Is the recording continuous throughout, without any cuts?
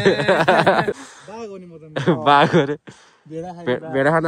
no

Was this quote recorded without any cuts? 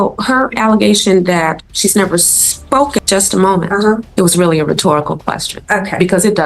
no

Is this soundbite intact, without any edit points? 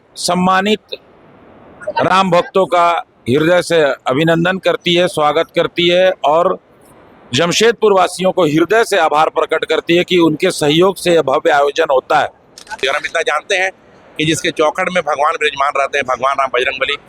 no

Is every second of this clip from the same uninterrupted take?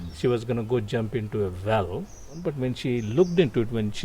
no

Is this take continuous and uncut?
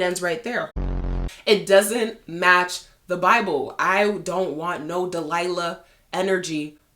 no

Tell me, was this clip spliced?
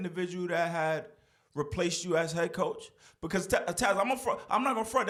no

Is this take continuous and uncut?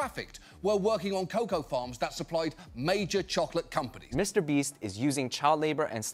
no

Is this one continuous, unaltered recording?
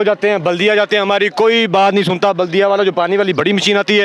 yes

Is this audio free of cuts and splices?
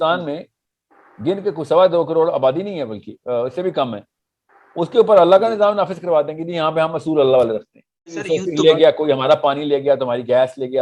no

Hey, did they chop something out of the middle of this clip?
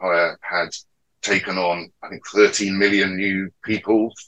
no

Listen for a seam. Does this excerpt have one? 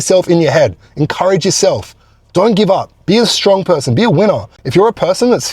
yes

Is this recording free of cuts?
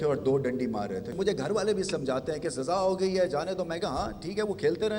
no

